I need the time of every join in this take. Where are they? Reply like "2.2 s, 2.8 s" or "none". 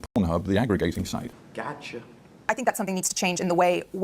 1.9 s